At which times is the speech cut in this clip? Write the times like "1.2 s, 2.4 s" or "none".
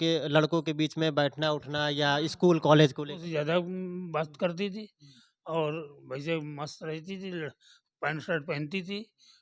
3.2 s